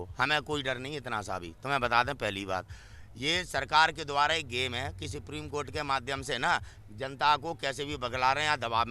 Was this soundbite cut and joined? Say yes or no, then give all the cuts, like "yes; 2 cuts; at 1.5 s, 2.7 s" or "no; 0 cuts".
no; 0 cuts